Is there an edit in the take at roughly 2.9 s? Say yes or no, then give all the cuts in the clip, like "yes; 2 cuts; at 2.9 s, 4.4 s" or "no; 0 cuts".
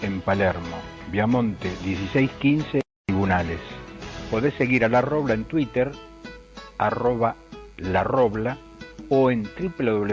yes; 1 cut; at 2.9 s